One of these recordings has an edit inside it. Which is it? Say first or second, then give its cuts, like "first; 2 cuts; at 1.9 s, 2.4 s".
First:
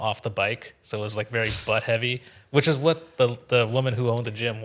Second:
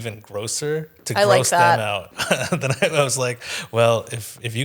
second; 1 cut; at 2.1 s